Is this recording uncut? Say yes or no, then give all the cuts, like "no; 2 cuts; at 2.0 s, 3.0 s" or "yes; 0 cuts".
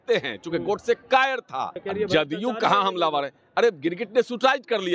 no; 1 cut; at 1.8 s